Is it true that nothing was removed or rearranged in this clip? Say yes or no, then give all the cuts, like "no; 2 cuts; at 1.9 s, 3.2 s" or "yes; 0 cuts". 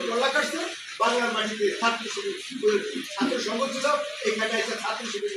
yes; 0 cuts